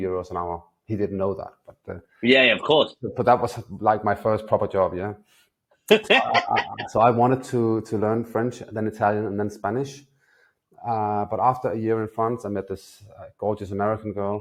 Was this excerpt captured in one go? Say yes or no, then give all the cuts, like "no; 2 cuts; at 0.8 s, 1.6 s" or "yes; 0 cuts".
yes; 0 cuts